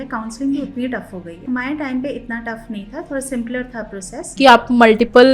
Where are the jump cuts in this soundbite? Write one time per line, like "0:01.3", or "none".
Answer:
0:04.3